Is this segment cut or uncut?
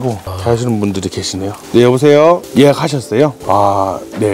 cut